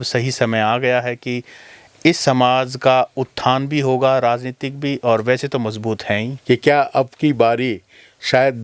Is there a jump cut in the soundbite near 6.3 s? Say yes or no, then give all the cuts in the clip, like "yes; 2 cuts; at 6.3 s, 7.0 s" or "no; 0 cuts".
yes; 1 cut; at 6.3 s